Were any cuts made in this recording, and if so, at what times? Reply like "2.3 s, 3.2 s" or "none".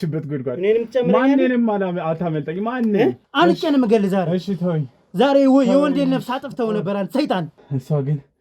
3.2 s, 7.6 s